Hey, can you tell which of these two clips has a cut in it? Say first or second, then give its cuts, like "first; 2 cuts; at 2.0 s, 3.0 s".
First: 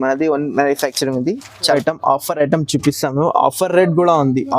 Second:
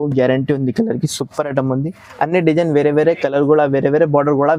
first; 1 cut; at 1.7 s